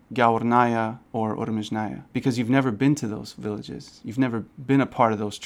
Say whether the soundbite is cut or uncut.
uncut